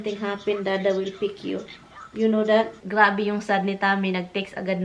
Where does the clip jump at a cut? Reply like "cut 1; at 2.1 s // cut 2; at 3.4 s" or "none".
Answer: cut 1; at 2.8 s

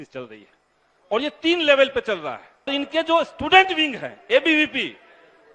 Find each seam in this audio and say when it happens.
cut 1; at 2.7 s

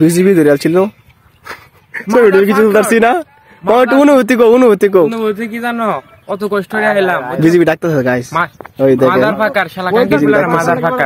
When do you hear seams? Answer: none

